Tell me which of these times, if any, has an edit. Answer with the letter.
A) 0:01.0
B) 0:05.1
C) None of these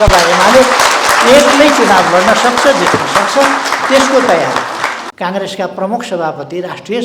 B